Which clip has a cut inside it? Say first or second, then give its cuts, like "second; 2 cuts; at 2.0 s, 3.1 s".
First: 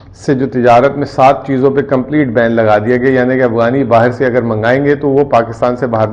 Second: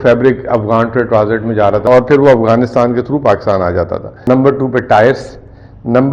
second; 2 cuts; at 1.9 s, 4.1 s